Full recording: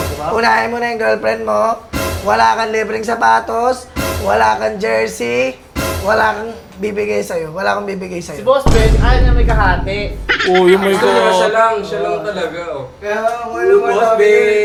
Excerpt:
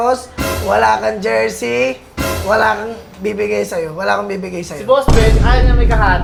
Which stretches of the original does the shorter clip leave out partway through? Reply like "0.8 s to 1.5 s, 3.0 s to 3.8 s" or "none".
none